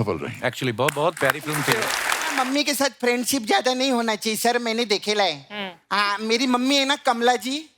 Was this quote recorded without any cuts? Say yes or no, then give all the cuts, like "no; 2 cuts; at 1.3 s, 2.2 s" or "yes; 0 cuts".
no; 1 cut; at 2.3 s